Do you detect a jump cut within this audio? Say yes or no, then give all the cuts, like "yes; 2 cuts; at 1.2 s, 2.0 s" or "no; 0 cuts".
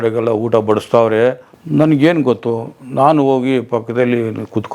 yes; 1 cut; at 1.5 s